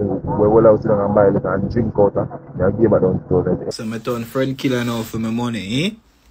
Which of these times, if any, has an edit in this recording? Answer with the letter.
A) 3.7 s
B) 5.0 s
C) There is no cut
A